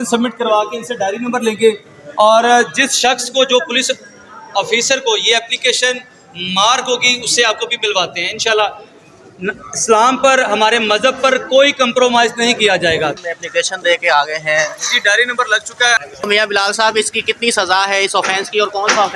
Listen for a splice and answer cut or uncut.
cut